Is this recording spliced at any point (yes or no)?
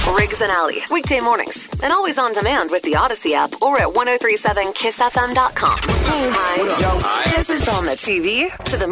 yes